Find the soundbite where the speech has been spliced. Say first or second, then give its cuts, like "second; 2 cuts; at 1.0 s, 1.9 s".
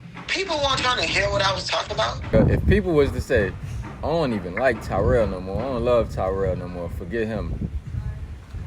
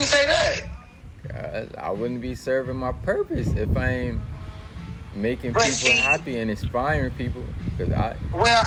first; 1 cut; at 2.3 s